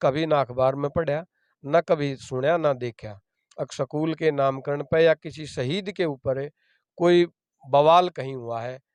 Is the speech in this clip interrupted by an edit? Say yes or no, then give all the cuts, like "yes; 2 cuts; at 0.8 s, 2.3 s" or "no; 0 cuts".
no; 0 cuts